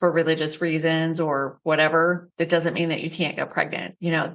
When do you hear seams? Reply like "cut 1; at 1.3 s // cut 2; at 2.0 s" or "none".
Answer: cut 1; at 1.5 s // cut 2; at 2.3 s // cut 3; at 3.6 s

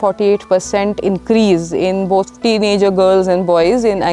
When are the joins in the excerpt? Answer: cut 1; at 2.3 s

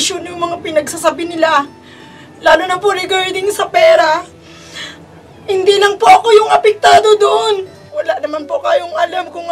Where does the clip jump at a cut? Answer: cut 1; at 7.9 s

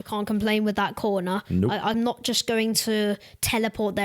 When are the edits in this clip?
cut 1; at 1.9 s

